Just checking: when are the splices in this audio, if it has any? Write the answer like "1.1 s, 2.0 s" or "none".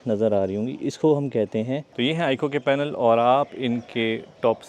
1.8 s

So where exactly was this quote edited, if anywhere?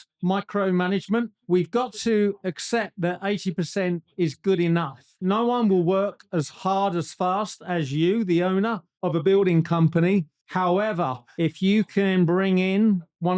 5.2 s

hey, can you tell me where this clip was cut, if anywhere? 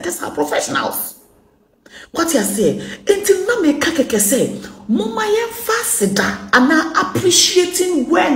none

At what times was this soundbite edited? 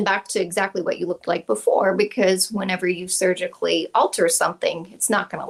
none

